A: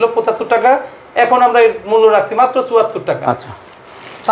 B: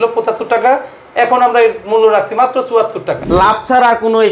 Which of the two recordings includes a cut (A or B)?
B